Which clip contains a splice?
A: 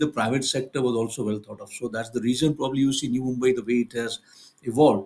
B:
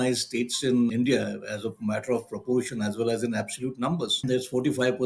B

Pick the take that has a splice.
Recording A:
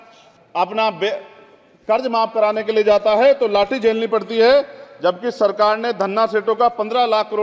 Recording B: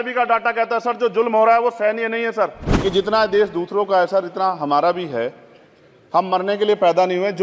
B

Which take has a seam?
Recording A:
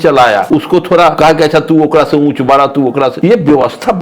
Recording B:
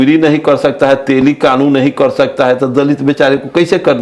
A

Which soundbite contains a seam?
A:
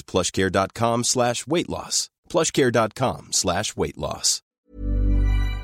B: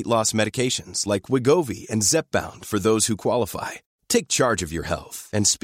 A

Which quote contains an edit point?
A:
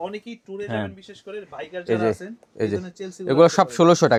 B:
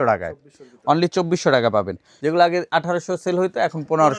B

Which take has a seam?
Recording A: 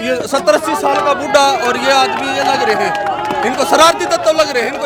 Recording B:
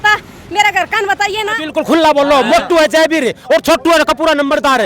B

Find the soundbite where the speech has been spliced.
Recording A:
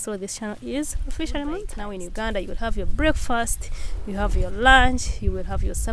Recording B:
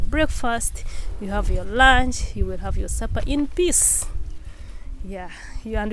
A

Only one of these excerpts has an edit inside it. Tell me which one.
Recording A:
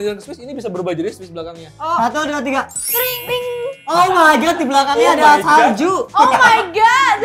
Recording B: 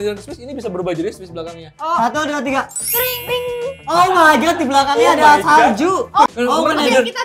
B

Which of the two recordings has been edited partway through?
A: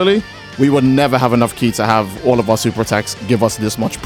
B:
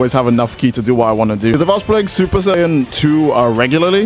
B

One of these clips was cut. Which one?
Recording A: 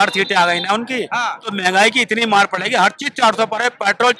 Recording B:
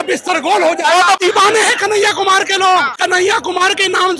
B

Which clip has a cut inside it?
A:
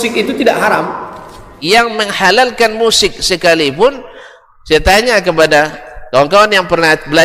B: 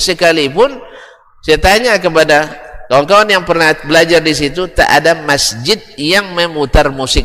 A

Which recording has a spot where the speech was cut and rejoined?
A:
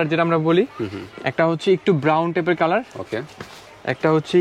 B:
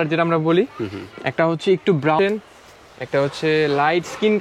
B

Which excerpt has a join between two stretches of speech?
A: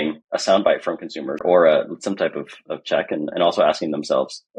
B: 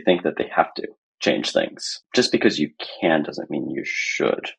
A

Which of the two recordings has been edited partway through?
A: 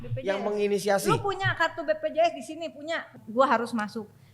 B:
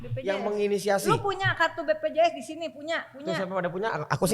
A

